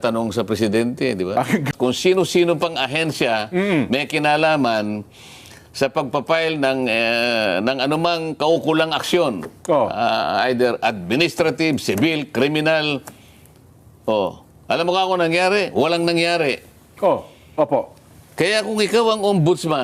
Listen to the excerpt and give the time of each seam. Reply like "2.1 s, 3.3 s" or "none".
1.7 s